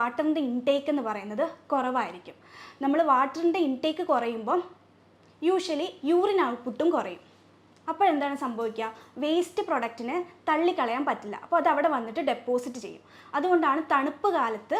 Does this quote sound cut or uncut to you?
uncut